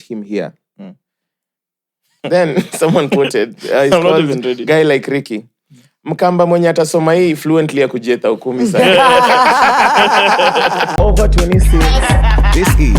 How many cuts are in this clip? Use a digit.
1